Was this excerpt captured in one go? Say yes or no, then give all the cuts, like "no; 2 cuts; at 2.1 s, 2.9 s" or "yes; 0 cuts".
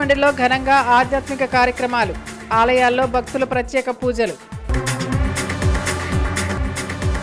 yes; 0 cuts